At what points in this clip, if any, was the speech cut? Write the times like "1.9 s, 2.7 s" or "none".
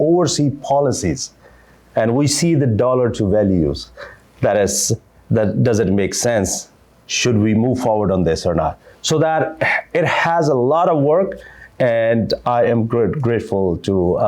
none